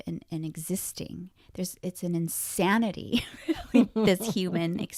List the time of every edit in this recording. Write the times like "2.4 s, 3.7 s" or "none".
none